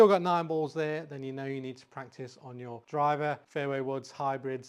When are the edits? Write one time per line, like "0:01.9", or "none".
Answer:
0:02.8
0:03.4